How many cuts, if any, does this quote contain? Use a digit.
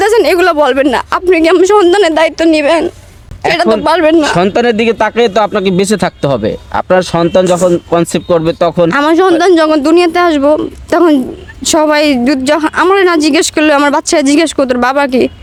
0